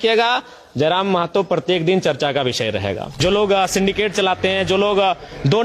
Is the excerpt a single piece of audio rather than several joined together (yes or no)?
no